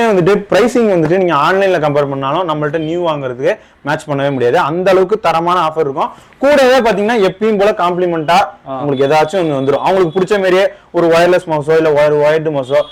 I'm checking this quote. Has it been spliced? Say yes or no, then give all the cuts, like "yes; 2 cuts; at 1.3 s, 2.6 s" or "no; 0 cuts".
no; 0 cuts